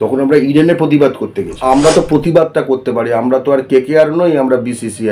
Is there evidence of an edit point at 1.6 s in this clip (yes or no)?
yes